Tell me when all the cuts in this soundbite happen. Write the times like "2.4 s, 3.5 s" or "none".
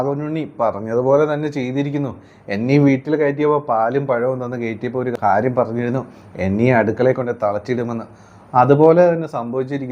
5.1 s